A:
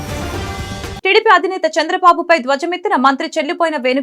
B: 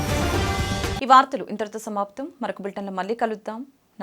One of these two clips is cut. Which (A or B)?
A